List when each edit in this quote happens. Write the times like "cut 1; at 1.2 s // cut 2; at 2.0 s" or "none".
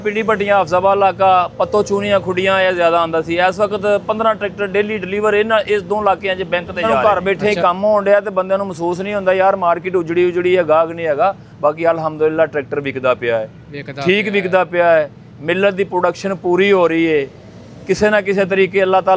cut 1; at 6.9 s